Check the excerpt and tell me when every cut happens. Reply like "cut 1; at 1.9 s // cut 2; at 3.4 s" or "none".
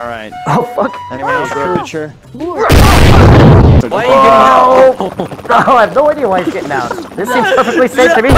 cut 1; at 3.8 s